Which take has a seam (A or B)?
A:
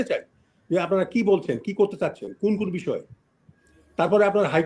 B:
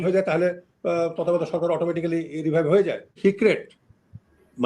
B